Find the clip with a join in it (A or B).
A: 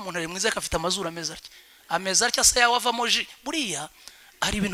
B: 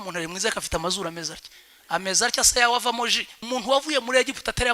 B